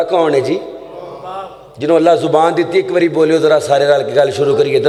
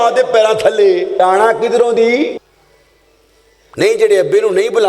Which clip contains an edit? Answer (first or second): second